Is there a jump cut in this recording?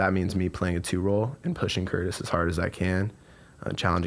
no; 0 cuts

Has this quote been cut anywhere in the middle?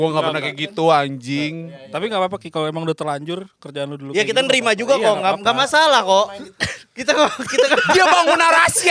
no; 0 cuts

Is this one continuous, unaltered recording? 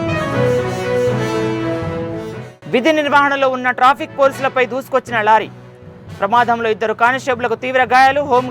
no; 1 cut; at 2.5 s

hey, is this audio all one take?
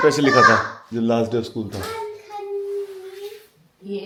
yes; 0 cuts

